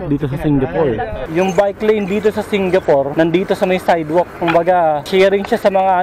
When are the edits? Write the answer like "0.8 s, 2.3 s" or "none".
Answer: 1.2 s, 3.1 s, 5.0 s